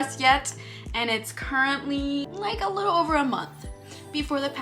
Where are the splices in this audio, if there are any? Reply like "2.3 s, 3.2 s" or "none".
2.2 s